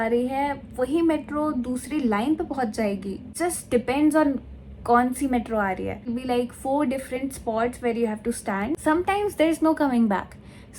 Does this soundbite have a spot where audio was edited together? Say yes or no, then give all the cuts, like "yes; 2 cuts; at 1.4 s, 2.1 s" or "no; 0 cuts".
yes; 3 cuts; at 3.3 s, 6.1 s, 8.8 s